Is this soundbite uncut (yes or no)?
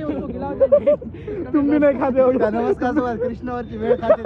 yes